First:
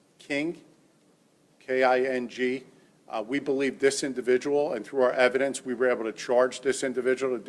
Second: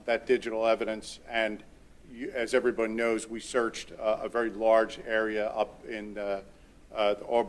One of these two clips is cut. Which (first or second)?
first